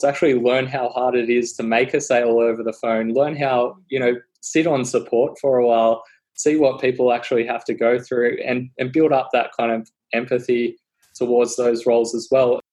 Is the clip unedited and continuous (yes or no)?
yes